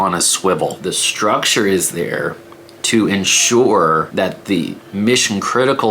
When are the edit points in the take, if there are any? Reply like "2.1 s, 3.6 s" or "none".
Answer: 0.8 s, 4.1 s